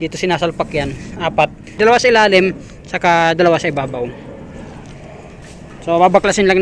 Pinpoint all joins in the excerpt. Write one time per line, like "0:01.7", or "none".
0:01.8

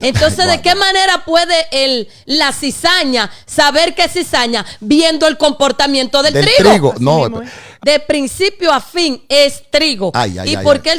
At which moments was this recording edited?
0:07.6

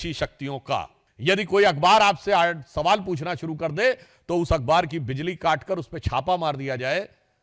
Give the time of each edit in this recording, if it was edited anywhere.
0:01.0

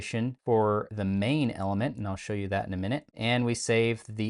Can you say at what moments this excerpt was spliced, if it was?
none

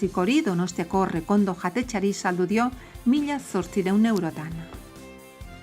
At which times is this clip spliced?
0:04.7

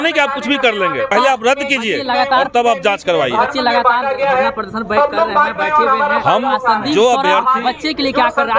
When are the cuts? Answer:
0:01.1

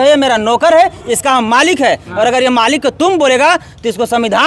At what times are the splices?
none

